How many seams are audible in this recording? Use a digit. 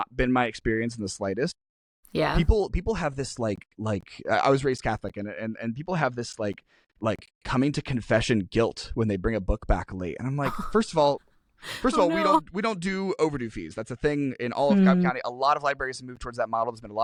0